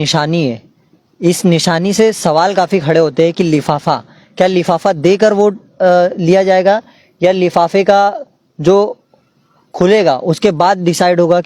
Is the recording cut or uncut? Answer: uncut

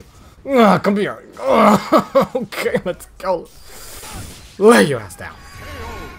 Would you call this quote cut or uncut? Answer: uncut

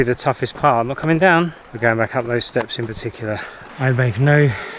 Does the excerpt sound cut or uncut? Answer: cut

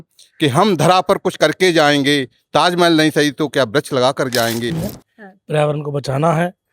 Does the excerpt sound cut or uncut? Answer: cut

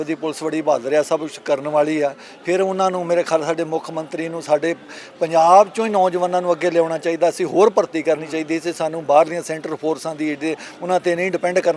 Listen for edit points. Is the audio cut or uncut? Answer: uncut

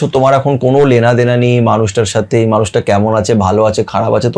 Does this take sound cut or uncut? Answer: uncut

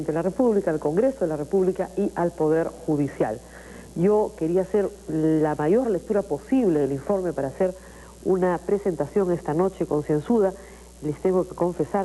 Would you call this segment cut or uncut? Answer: uncut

